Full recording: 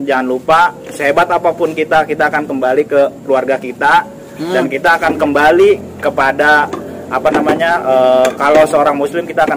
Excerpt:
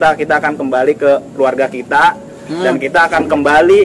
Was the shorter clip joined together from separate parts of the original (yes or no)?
no